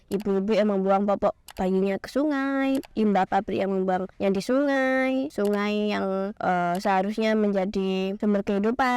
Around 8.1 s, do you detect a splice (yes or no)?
yes